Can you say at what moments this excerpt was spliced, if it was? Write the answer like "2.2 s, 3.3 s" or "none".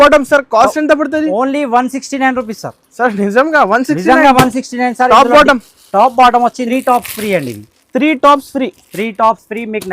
6.6 s